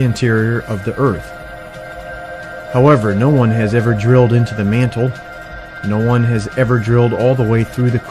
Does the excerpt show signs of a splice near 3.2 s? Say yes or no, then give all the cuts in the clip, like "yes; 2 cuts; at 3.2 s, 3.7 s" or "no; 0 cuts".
yes; 1 cut; at 3.2 s